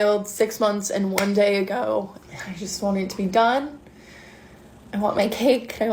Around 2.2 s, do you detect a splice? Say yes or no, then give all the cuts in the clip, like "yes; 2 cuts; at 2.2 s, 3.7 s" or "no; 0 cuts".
yes; 1 cut; at 2.2 s